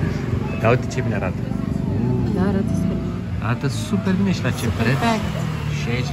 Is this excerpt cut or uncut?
uncut